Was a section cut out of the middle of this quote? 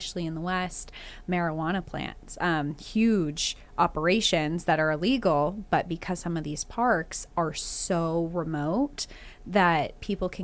no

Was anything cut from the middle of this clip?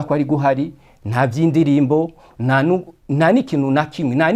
no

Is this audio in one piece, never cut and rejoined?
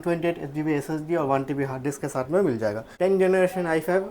no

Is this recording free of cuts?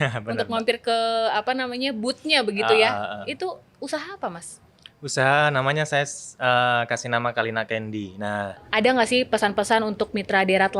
no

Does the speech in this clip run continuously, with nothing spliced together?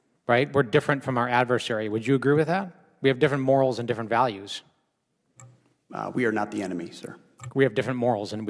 yes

